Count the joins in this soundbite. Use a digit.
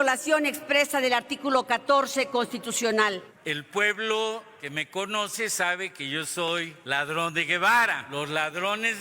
4